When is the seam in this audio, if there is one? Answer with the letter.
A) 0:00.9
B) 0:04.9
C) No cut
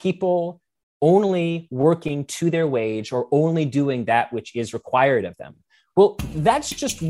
C